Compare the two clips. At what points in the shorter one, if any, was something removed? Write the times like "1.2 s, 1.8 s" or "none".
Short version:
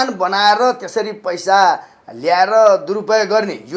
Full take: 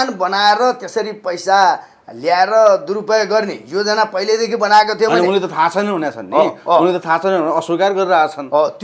none

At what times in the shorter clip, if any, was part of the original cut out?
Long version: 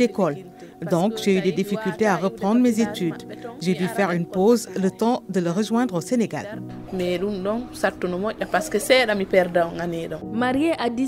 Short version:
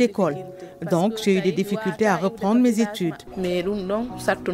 3.2 s

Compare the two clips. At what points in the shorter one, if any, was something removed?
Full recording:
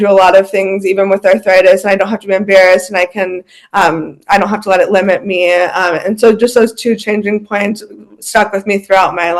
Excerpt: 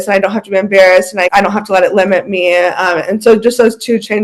1.3 s

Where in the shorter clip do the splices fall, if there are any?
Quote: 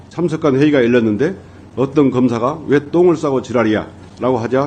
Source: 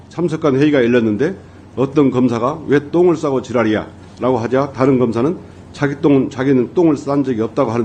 none

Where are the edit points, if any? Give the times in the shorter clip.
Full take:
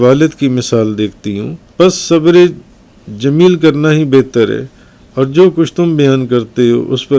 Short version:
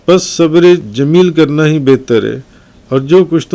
0.9 s

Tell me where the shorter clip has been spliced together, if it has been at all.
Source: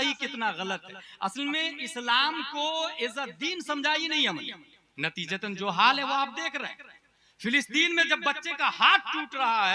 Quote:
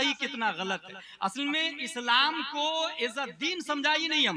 none

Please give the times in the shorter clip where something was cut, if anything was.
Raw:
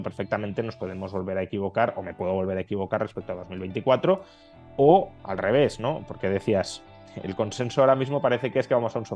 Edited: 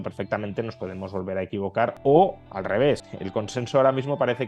2.0 s, 3.0 s

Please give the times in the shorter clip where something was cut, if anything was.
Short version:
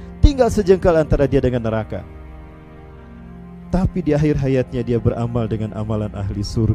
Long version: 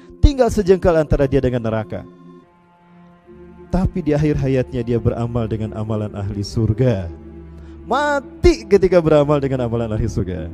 none

